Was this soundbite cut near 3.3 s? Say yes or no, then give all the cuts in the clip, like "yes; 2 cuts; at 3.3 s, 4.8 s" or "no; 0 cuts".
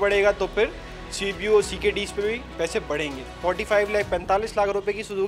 yes; 1 cut; at 3.3 s